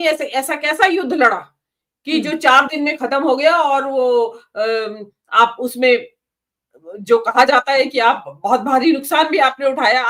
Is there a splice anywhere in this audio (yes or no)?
no